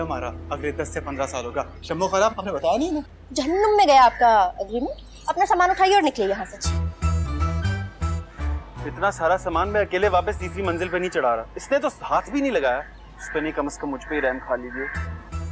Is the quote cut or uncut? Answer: uncut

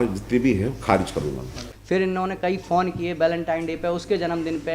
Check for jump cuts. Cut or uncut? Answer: cut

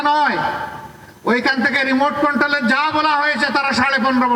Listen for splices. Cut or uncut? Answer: uncut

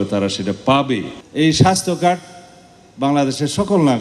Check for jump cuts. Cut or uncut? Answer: cut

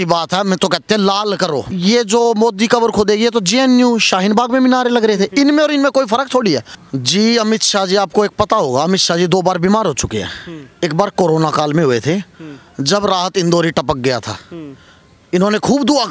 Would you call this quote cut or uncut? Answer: cut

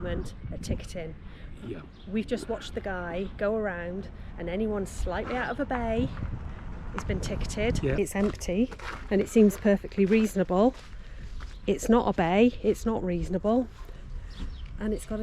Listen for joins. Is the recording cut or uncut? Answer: cut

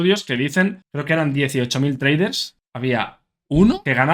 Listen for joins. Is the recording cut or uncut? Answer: cut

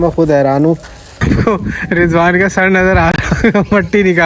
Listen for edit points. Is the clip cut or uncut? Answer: cut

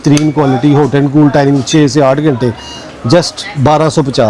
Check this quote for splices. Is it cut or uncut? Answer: uncut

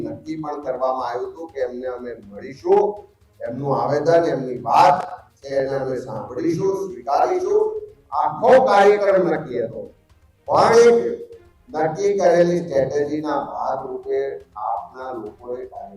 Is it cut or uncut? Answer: uncut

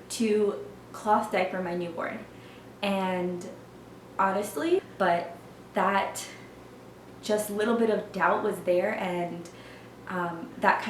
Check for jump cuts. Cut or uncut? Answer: cut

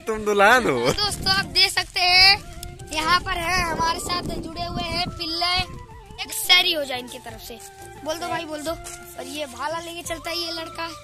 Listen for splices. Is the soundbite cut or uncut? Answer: cut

